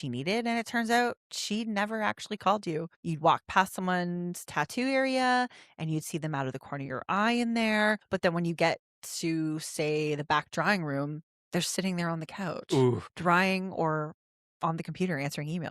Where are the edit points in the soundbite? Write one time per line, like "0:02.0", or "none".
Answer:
0:03.0
0:08.0
0:13.1